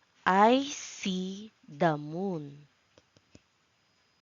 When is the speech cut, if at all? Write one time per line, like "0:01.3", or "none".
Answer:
0:02.1